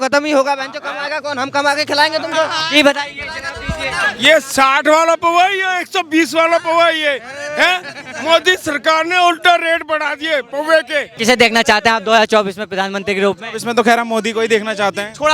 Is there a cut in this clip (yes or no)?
yes